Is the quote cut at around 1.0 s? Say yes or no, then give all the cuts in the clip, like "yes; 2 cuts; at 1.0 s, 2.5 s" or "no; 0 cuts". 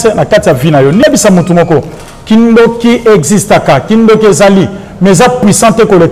yes; 1 cut; at 1.0 s